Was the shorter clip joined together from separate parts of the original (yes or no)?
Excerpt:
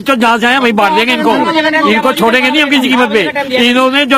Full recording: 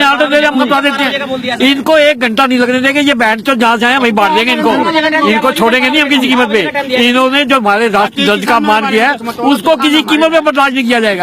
no